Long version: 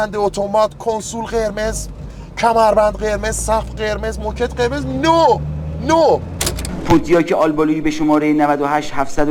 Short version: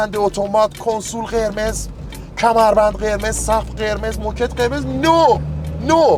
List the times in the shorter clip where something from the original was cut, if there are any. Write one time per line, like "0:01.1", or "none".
none

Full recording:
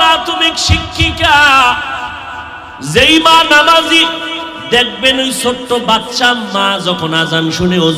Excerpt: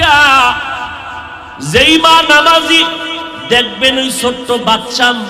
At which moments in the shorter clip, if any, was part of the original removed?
none

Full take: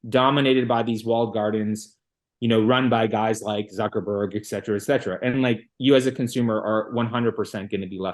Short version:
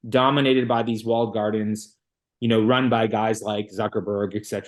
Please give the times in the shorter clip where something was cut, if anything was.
none

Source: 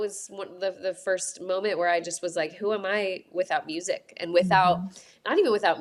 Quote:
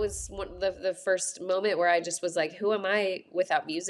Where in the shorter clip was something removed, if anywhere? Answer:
none

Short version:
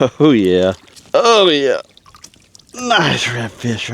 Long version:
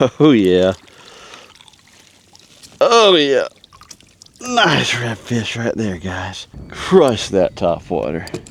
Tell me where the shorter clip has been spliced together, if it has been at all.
0:00.9

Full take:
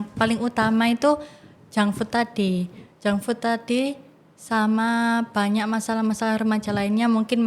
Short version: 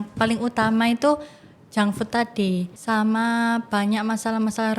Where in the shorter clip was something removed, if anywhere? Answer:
0:02.7

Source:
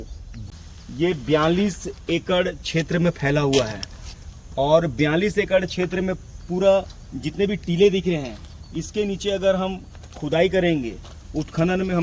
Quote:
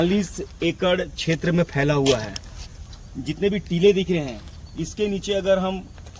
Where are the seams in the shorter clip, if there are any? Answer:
0:03.0

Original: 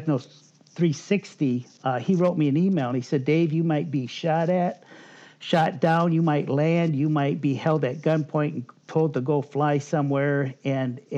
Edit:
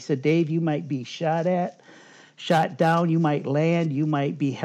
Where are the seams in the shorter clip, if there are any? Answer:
none

